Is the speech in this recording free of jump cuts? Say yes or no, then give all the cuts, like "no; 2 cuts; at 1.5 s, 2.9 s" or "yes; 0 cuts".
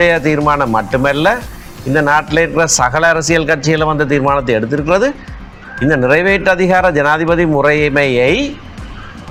yes; 0 cuts